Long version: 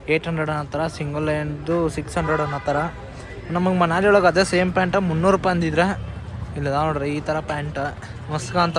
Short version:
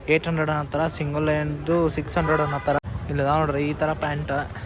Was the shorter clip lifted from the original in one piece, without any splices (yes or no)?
no